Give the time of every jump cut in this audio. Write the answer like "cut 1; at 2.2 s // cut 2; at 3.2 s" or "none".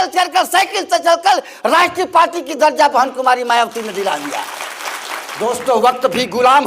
cut 1; at 5.3 s